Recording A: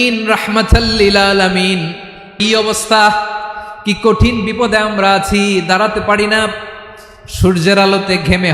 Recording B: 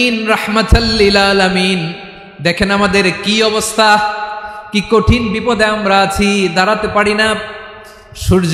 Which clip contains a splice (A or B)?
A